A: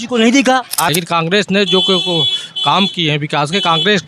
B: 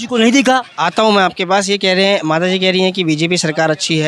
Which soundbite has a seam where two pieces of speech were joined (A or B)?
A